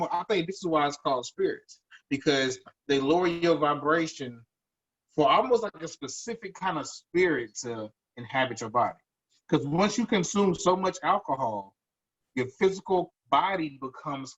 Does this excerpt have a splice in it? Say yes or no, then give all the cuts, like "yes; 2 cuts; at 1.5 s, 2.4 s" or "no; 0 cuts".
no; 0 cuts